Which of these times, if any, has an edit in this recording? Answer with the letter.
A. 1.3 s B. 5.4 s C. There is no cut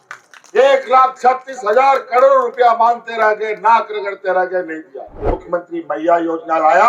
B